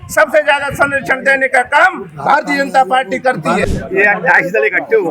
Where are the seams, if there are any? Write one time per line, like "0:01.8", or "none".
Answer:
0:03.7